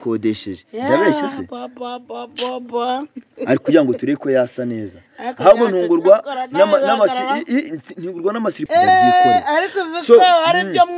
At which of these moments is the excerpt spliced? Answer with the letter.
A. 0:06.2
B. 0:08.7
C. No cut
B